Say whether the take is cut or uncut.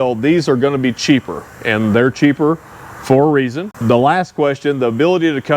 uncut